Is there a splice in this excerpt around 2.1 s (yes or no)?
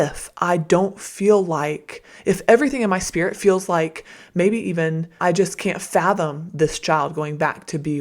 no